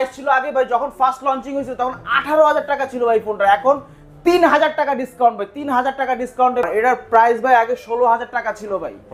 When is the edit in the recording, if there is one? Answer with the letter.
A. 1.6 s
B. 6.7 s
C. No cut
B